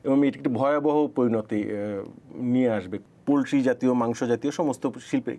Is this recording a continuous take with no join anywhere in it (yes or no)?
no